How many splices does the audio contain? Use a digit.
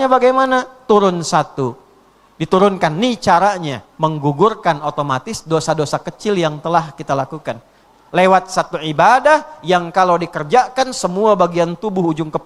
2